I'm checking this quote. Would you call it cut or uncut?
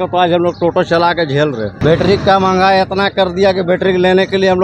cut